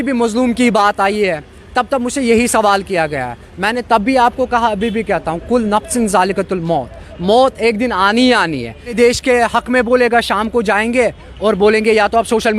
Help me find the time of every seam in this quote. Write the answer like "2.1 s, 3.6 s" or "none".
8.9 s